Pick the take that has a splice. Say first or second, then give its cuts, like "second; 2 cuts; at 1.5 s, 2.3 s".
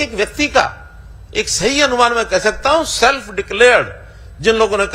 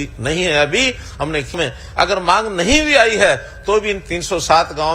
second; 1 cut; at 1.5 s